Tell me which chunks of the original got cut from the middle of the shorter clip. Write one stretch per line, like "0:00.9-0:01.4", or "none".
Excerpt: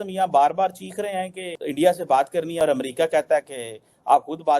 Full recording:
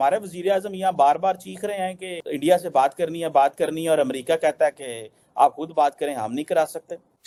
0:03.1-0:03.8